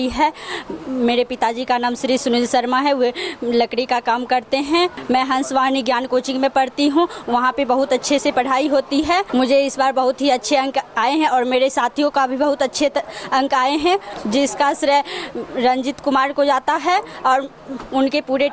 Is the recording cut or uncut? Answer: uncut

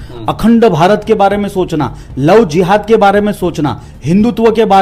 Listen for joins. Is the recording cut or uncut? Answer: uncut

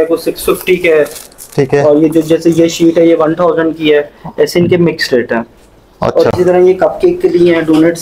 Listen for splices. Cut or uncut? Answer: uncut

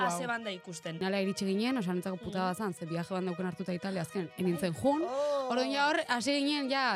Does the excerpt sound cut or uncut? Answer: cut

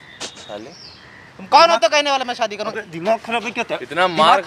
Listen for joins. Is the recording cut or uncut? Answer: uncut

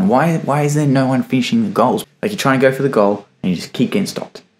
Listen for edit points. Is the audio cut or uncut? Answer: cut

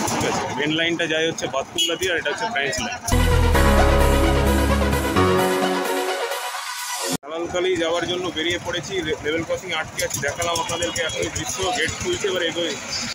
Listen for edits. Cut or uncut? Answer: uncut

